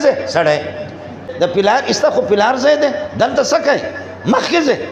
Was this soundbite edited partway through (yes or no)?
yes